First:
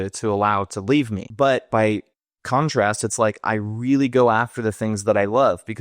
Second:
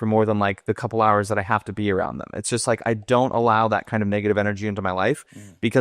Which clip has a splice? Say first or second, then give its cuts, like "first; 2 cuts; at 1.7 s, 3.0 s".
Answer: first; 1 cut; at 1.2 s